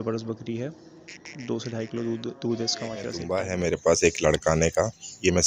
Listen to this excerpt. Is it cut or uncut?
cut